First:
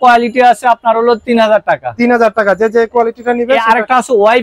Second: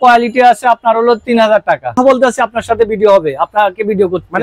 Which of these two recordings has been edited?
second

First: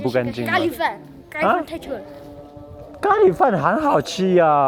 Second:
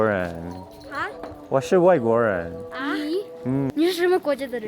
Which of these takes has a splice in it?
second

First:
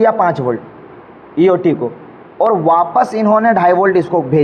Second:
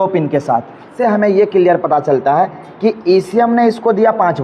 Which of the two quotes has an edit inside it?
second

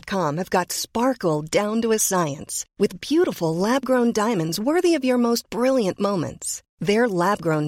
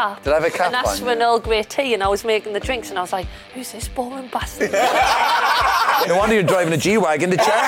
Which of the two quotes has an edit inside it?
second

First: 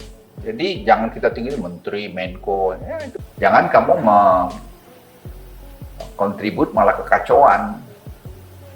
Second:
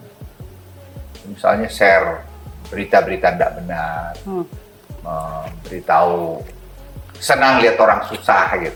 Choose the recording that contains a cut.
first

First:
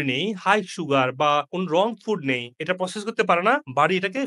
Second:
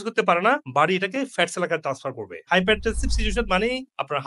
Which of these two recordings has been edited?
second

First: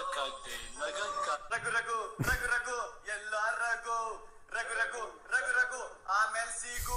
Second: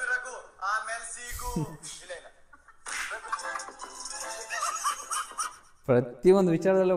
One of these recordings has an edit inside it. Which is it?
first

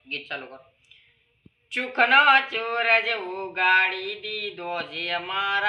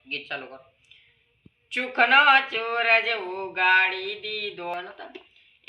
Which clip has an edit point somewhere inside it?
second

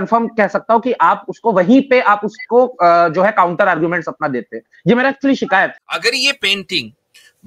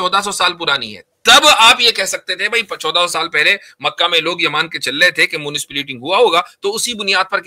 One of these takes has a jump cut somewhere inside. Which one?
first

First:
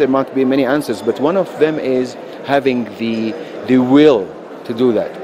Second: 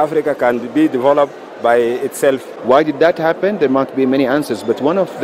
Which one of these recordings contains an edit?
second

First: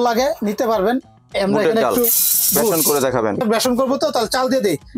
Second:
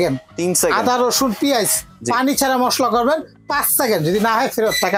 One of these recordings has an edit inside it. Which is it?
first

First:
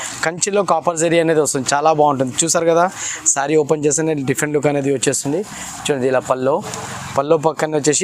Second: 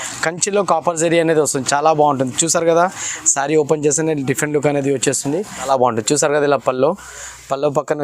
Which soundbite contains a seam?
second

